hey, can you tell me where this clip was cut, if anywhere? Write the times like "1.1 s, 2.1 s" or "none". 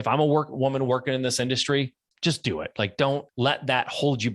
2.1 s, 3.3 s

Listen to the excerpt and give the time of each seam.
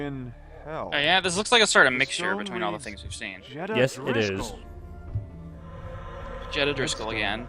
4.5 s

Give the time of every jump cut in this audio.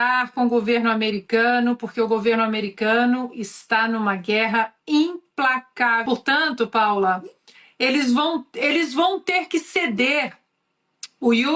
6.0 s

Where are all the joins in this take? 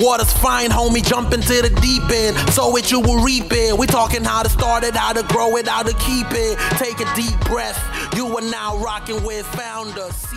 none

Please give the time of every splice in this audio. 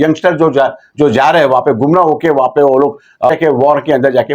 3.3 s

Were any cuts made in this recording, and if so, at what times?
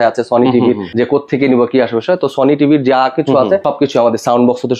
0.9 s, 3.6 s

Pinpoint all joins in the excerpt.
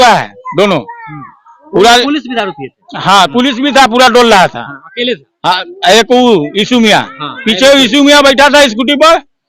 none

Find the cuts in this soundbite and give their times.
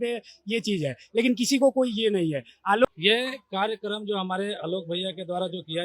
2.8 s

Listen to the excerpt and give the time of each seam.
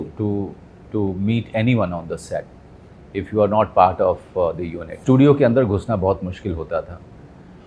none

